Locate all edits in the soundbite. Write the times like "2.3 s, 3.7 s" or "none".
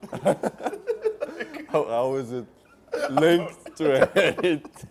none